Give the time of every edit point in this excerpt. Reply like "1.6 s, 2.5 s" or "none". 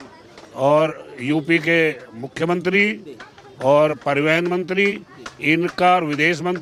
none